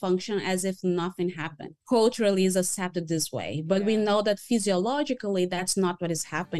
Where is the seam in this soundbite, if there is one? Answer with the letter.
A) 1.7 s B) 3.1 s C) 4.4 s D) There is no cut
A